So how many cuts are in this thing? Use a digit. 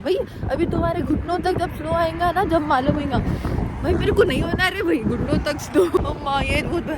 1